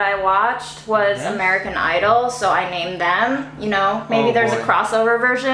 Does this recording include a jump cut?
no; 0 cuts

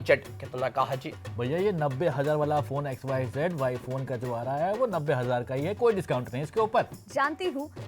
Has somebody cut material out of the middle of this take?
yes; 1 cut; at 6.9 s

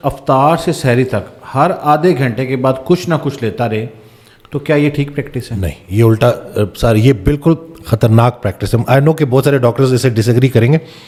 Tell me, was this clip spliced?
no; 0 cuts

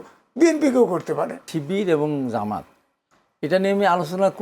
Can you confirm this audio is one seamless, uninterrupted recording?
no; 1 cut; at 1.5 s

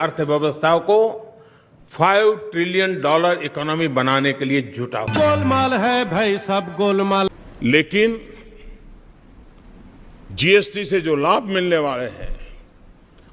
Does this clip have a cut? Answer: yes; 1 cut; at 7.3 s

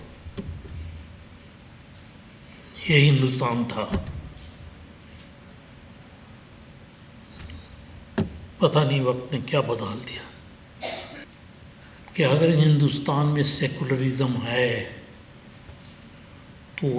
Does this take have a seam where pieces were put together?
yes; 1 cut; at 11.3 s

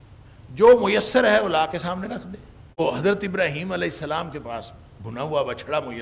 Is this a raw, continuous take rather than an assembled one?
no; 1 cut; at 2.8 s

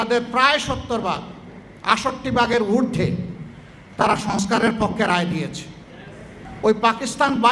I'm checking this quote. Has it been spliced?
yes; 1 cut; at 6.4 s

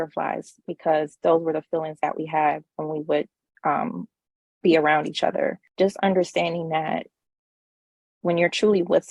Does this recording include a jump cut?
yes; 1 cut; at 5.6 s

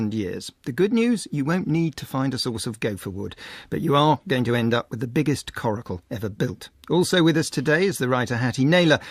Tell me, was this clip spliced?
no; 0 cuts

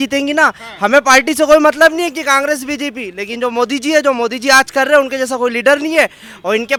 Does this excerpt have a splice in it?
no; 0 cuts

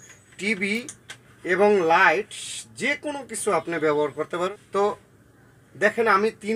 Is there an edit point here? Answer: yes; 1 cut; at 4.5 s

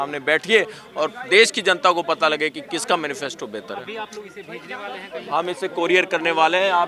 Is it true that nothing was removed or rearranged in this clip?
yes; 0 cuts

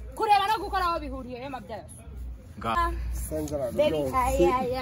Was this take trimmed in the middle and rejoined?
yes; 1 cut; at 2.8 s

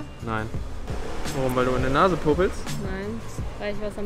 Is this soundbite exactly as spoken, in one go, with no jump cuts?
yes; 0 cuts

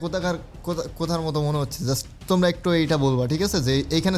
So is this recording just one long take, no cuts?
yes; 0 cuts

